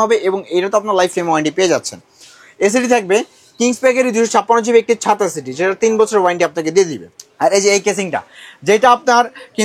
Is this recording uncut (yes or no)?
yes